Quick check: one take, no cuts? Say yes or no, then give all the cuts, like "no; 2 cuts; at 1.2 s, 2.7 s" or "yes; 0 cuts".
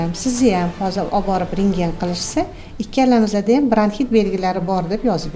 yes; 0 cuts